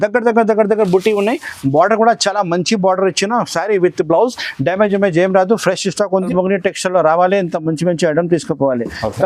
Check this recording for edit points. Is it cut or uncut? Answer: cut